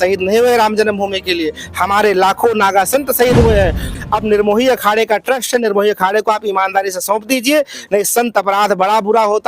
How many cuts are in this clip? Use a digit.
1